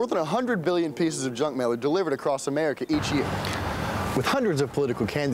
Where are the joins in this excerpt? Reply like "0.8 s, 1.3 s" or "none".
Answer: none